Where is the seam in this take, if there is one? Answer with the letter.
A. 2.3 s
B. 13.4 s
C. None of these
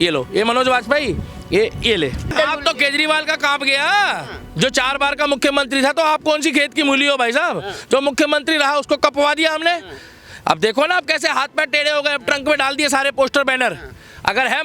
A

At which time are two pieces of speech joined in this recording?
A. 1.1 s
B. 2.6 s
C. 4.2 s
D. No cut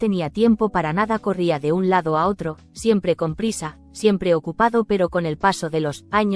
D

